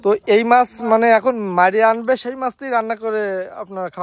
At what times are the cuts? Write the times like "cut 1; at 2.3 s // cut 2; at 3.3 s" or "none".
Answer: none